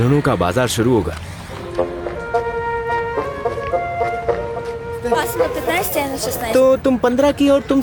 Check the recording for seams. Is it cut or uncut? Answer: uncut